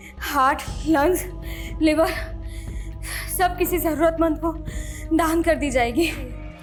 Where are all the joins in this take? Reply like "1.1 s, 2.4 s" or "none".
none